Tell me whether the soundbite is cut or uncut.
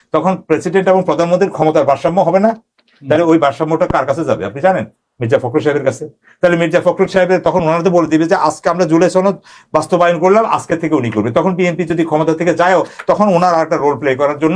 uncut